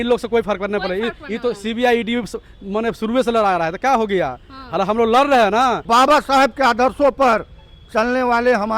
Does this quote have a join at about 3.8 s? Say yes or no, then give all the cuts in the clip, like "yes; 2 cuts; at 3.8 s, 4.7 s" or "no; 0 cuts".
no; 1 cut; at 5.8 s